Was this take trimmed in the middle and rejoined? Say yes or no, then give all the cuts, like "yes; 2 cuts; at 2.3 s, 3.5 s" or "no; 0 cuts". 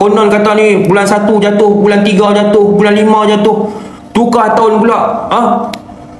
no; 0 cuts